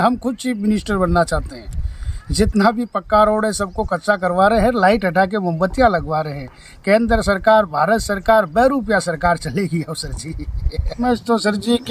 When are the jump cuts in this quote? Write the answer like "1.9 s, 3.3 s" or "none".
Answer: 11.0 s